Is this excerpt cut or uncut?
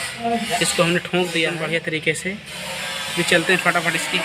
cut